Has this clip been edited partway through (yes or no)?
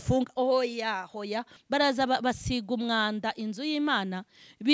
yes